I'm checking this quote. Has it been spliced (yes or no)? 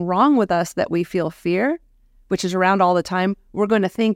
no